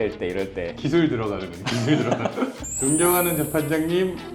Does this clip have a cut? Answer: yes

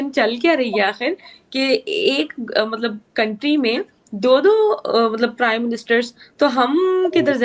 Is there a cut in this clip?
no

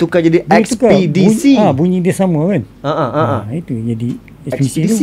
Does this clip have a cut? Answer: no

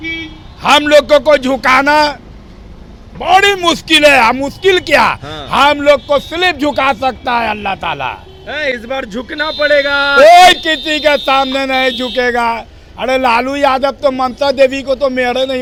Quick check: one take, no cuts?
yes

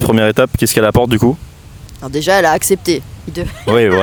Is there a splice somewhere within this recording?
no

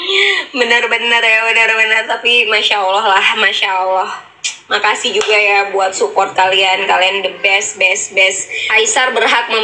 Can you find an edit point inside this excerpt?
yes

